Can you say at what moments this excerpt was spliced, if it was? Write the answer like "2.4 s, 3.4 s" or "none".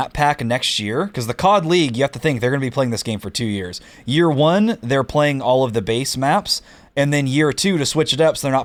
none